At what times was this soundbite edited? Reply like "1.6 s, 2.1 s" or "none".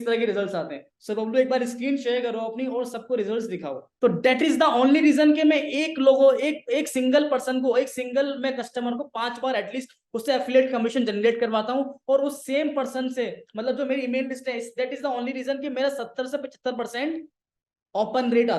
3.9 s

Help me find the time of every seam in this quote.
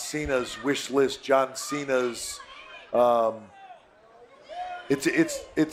none

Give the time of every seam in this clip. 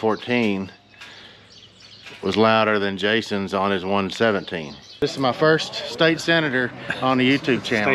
5.0 s

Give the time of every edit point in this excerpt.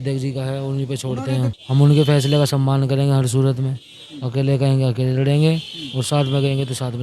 1.6 s

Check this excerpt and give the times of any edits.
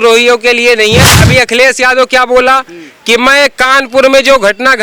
1.1 s

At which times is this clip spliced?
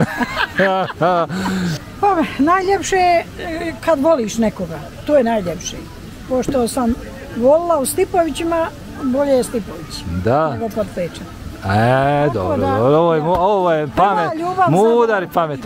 1.8 s

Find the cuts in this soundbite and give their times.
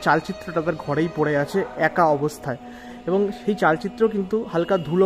none

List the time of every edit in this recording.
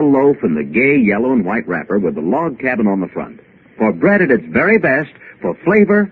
none

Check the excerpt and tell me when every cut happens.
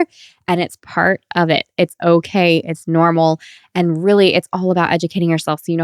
none

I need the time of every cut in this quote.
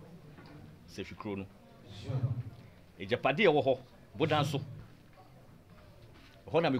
none

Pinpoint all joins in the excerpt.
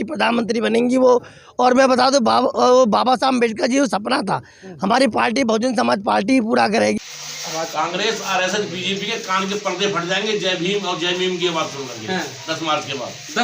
7.0 s

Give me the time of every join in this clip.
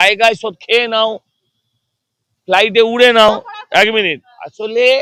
none

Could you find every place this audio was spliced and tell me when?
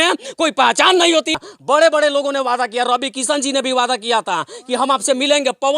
1.4 s

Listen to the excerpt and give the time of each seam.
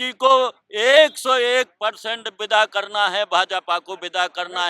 none

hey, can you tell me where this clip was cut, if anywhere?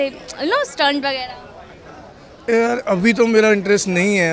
none

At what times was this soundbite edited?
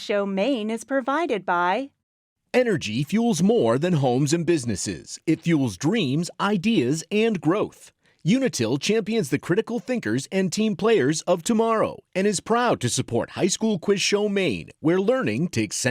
2.3 s

